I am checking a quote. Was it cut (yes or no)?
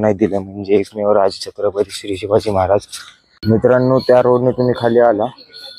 yes